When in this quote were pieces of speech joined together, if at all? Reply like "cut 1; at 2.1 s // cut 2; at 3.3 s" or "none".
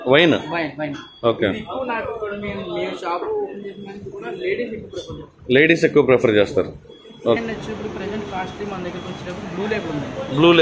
cut 1; at 7.4 s